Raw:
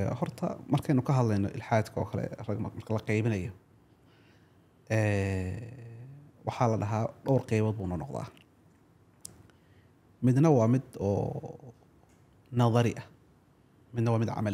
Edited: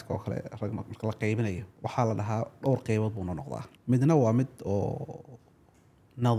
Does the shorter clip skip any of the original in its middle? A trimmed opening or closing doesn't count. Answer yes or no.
yes